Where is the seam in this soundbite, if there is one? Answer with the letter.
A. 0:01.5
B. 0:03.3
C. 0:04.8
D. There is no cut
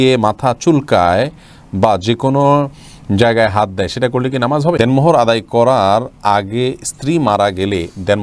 C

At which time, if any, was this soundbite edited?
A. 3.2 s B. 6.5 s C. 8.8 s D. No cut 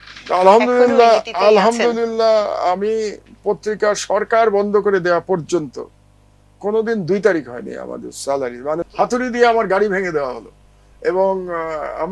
C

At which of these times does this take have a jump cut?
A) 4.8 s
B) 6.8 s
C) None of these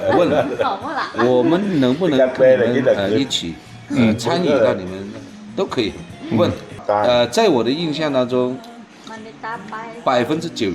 B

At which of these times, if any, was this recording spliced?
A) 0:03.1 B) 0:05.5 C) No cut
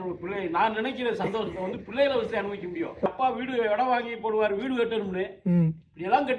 A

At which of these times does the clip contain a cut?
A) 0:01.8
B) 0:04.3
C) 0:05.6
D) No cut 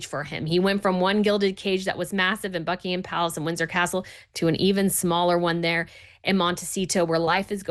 D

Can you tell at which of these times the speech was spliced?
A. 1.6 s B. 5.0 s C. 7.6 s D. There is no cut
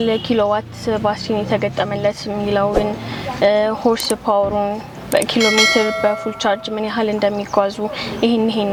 D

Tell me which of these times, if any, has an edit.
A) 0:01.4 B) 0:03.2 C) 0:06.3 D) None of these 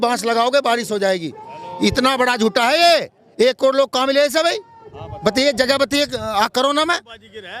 D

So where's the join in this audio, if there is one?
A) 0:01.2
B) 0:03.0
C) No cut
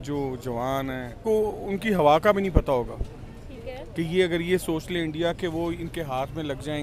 A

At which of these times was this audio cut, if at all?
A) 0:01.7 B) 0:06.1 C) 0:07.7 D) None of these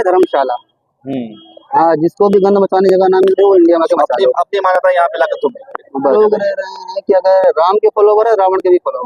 B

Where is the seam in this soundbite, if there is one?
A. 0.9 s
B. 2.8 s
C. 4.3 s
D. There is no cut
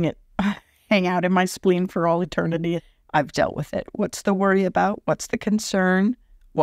B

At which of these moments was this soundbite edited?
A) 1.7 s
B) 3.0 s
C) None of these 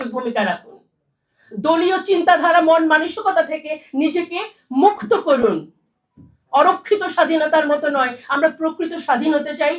C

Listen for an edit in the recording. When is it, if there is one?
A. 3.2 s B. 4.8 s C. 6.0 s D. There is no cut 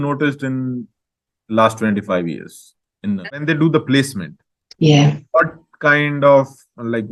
A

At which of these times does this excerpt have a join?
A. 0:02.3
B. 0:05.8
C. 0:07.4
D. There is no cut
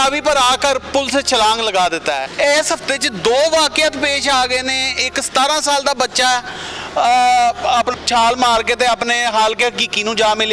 A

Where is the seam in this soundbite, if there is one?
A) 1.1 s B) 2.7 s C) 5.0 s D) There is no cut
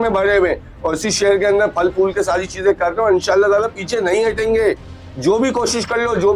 D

